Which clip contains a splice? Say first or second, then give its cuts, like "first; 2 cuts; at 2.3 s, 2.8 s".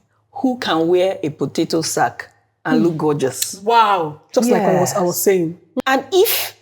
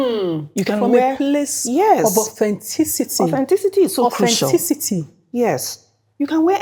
first; 1 cut; at 5.6 s